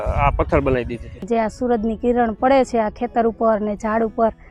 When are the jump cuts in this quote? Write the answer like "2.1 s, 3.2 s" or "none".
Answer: 1.2 s